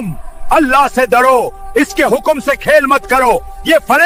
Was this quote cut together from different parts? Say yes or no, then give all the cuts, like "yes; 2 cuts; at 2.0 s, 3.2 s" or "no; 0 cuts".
no; 0 cuts